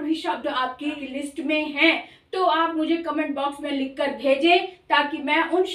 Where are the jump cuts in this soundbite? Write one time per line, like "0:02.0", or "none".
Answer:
0:01.0